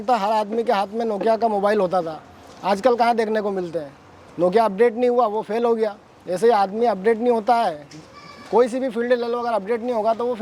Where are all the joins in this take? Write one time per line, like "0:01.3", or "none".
none